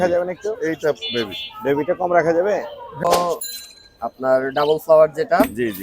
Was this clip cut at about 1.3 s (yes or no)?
no